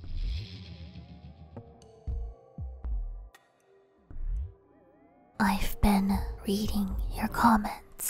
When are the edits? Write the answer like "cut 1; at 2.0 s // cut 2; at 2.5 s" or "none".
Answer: cut 1; at 1.2 s